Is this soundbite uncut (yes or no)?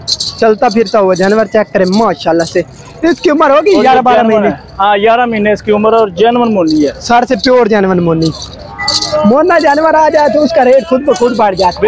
yes